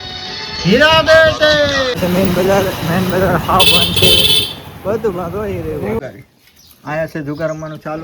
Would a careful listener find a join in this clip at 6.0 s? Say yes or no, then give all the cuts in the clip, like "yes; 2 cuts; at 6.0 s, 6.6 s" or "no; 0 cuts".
yes; 2 cuts; at 2.0 s, 6.0 s